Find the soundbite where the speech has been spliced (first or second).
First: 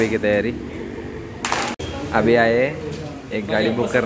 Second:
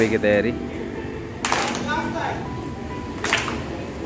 first